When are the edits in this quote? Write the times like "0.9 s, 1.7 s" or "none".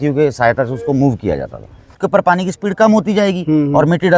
2.0 s

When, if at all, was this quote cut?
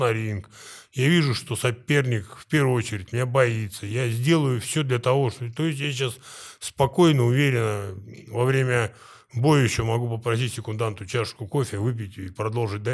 none

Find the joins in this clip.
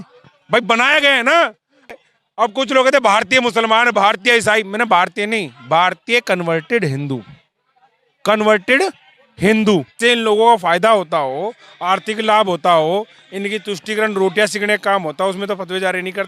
1.9 s, 9.9 s

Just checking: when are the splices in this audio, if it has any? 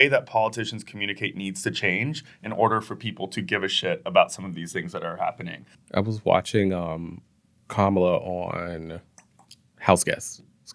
none

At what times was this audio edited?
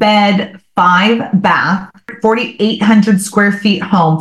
2.1 s

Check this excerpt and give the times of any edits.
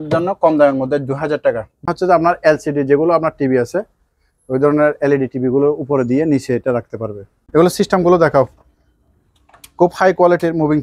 1.7 s, 7.4 s

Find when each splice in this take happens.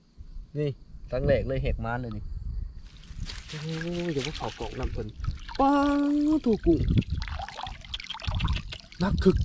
none

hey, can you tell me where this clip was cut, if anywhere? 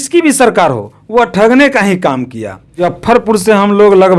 2.9 s

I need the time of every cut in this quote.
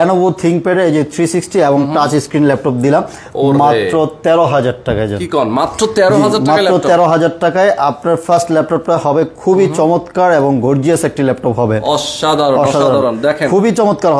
none

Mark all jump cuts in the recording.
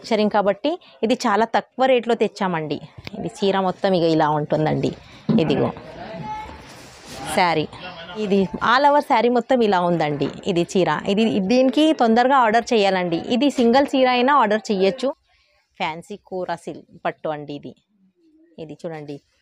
8.2 s, 15.0 s

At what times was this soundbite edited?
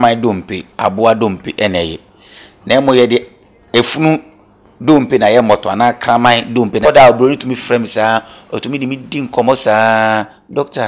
6.8 s

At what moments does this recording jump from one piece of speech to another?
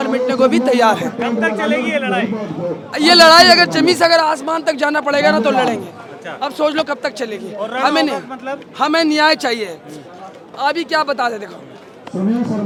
none

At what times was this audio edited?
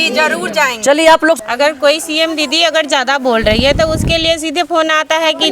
1.4 s

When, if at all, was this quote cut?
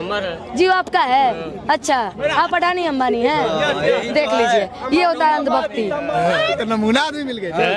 6.1 s

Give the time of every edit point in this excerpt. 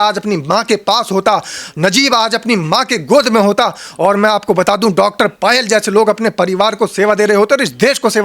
none

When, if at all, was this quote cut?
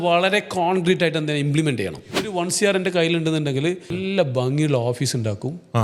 2.1 s, 3.9 s

